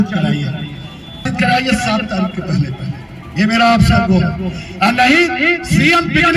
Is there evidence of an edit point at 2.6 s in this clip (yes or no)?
no